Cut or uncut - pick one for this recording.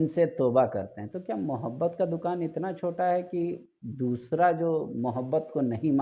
uncut